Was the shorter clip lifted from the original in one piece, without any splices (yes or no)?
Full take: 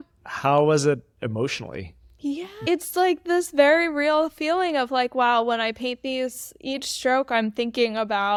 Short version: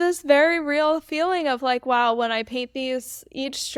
yes